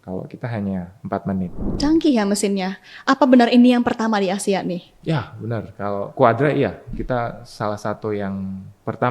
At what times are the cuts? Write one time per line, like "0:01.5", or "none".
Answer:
0:01.6